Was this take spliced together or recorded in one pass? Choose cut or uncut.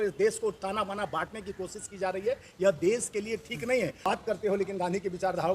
cut